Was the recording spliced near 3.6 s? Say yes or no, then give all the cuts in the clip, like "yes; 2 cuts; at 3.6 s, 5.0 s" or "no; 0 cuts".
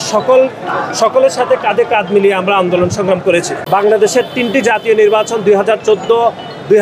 yes; 1 cut; at 3.6 s